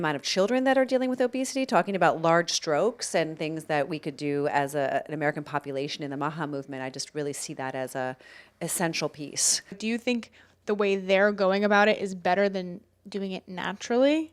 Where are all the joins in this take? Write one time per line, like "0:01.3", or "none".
0:09.8

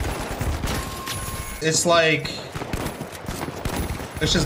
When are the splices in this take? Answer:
0:01.6

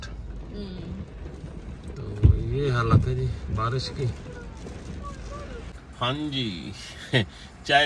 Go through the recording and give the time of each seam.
0:05.7

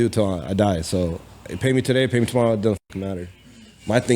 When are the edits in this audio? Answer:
none

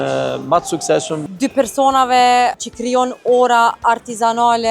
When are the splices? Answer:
0:01.2
0:02.6

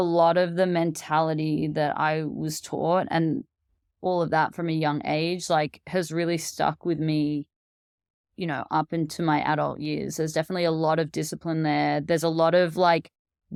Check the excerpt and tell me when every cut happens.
none

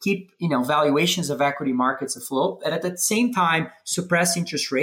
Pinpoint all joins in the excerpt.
none

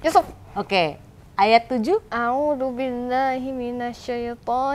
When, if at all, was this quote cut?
0:02.1

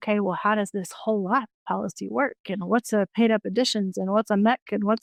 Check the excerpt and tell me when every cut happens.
none

